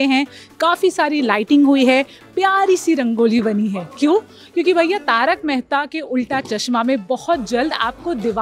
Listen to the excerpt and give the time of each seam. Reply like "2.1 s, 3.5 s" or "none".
none